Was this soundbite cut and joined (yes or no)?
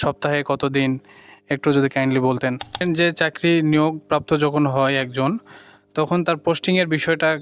yes